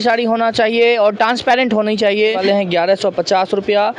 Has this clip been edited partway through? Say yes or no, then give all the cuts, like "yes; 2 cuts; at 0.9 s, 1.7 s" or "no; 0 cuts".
yes; 1 cut; at 2.4 s